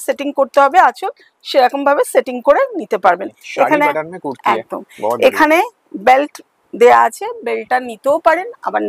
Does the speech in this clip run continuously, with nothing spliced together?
yes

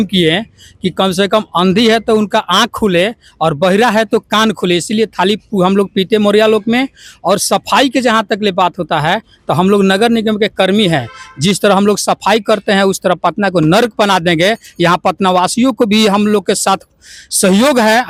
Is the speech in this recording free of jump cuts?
yes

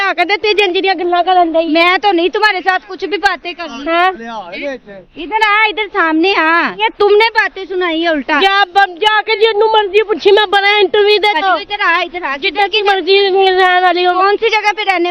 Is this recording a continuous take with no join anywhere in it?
no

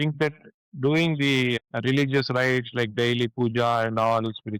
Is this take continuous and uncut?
no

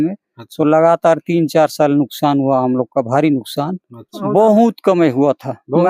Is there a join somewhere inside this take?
yes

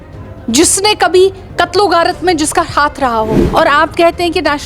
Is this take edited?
yes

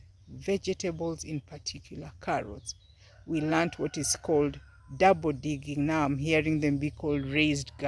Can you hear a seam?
no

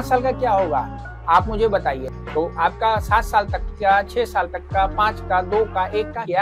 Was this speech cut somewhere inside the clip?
yes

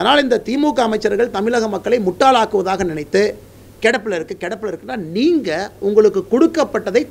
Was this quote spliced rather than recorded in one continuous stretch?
no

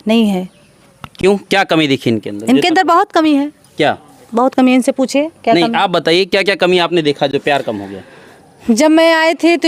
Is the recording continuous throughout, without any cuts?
yes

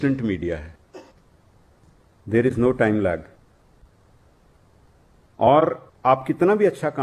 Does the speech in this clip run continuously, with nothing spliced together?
yes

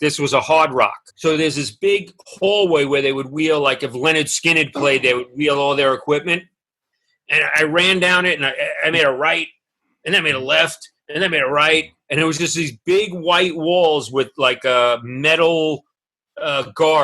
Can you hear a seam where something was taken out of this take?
yes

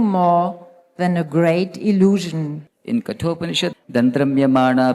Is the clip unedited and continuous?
no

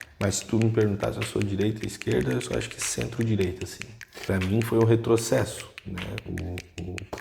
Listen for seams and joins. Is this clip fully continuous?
no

